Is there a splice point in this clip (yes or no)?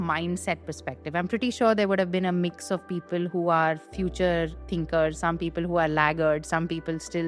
no